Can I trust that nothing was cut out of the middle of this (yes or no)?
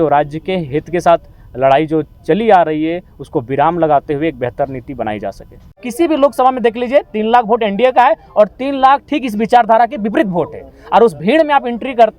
no